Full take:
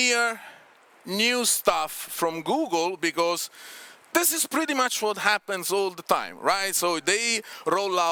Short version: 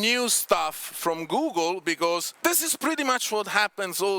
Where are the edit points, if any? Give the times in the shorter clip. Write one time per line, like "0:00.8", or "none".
0:02.3